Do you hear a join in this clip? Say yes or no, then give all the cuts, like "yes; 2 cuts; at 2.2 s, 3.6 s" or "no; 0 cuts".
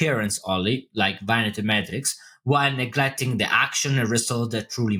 no; 0 cuts